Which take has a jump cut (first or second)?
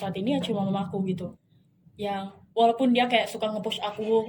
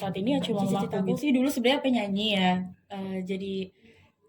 second